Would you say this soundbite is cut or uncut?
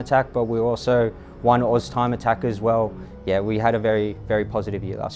cut